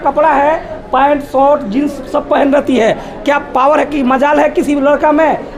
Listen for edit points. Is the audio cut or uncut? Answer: uncut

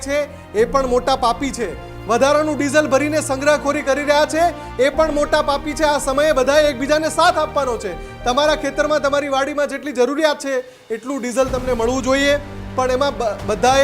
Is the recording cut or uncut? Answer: uncut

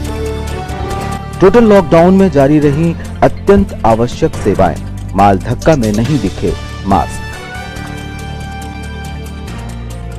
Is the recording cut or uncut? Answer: cut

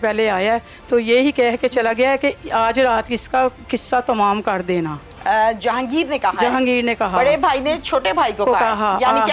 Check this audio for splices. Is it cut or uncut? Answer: uncut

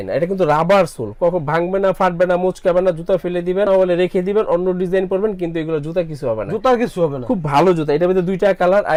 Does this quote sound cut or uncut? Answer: uncut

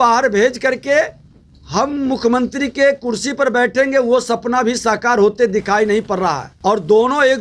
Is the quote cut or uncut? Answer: cut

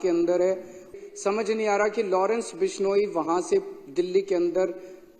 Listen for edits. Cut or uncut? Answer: cut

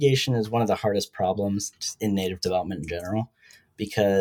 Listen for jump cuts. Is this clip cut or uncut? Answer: cut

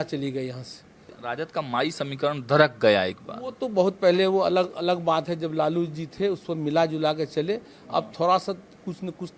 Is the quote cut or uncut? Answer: cut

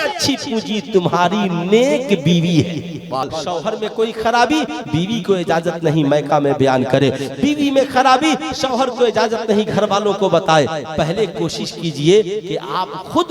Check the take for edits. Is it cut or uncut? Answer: cut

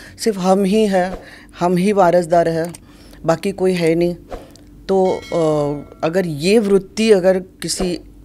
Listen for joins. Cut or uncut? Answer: uncut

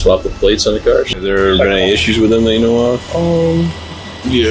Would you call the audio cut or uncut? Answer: cut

